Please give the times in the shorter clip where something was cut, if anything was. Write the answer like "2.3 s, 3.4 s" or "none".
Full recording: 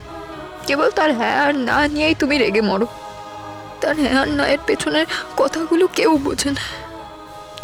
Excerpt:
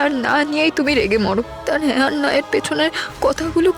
1.5 s